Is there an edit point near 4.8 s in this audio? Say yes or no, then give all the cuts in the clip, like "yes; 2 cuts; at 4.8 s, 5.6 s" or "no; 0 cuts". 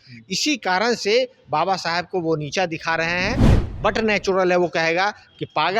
no; 1 cut; at 3.5 s